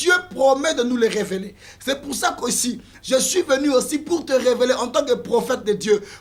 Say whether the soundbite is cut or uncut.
uncut